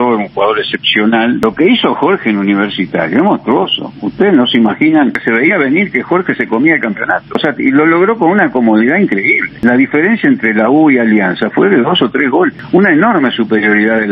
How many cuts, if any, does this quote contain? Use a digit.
5